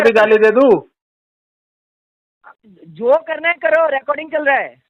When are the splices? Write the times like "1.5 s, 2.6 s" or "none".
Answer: none